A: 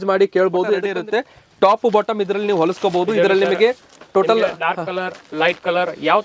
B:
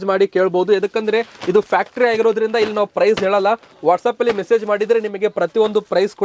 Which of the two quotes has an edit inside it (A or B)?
A